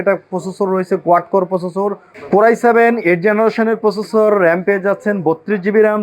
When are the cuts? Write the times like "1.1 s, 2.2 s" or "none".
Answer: 2.1 s

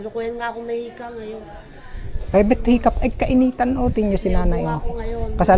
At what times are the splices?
none

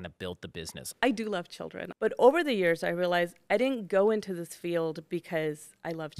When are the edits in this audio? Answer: 0.9 s, 1.8 s

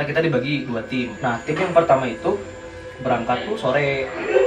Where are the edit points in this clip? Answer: 1.1 s

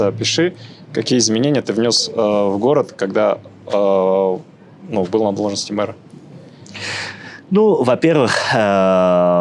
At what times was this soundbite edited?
none

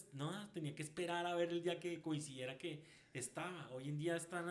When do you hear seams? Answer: none

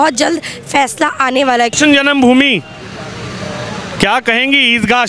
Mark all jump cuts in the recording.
1.7 s

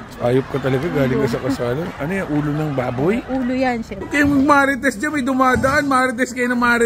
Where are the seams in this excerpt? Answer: 4.0 s

